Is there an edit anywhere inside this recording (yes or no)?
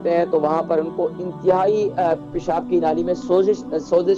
no